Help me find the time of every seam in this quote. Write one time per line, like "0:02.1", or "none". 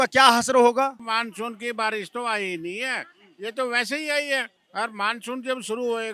0:00.9
0:04.6

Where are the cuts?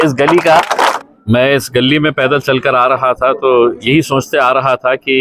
0:01.0

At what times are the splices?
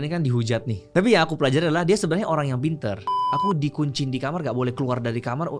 0:00.9
0:03.2

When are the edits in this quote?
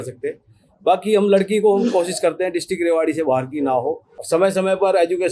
0:04.1

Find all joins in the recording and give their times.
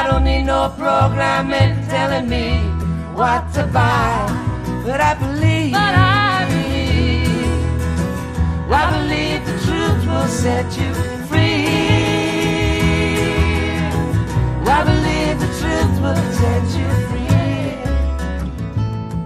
0:04.8

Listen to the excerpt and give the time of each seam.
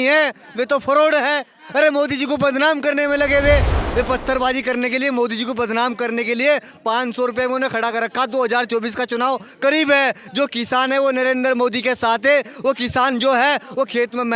0:03.7

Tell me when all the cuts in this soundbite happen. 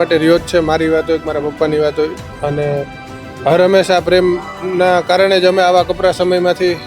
none

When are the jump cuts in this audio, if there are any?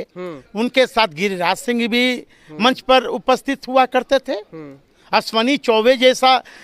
none

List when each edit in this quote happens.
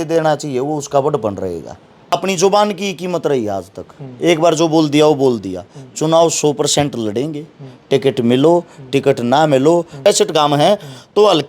0:02.1
0:10.0

